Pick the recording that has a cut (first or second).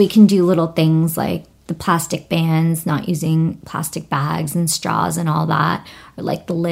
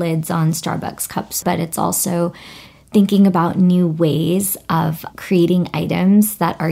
second